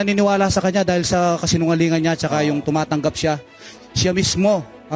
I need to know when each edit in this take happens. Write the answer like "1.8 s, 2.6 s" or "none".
none